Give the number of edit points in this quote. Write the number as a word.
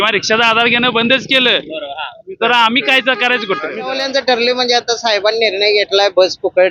one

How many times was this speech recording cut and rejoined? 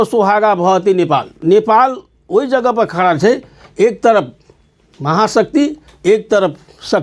one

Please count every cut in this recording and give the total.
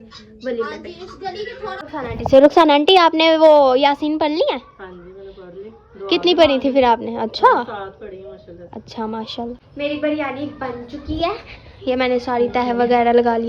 two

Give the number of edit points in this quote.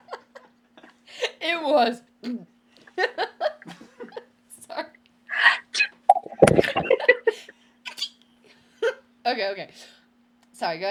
zero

